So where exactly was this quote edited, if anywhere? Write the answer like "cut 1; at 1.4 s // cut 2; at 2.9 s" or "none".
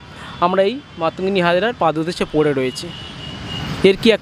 none